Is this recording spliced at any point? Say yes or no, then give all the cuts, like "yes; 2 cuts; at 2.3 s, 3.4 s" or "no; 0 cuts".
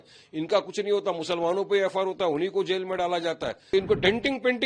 yes; 1 cut; at 3.7 s